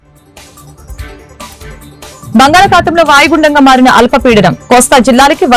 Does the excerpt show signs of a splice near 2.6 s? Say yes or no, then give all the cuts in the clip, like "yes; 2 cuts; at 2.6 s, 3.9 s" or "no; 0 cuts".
no; 1 cut; at 1.1 s